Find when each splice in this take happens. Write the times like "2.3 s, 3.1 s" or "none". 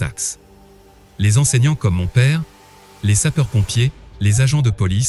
1.0 s